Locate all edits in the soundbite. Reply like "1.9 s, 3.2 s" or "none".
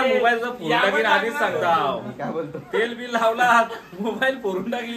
none